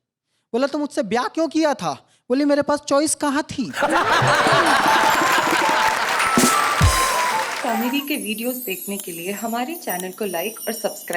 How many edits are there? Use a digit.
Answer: 1